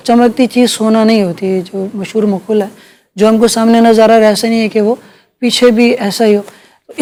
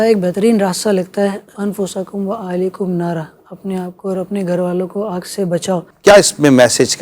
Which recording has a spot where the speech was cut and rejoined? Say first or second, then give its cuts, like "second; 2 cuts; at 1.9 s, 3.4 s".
second; 2 cuts; at 1.5 s, 5.9 s